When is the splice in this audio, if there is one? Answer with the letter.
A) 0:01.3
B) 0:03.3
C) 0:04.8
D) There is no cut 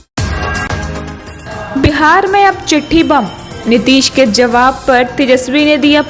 A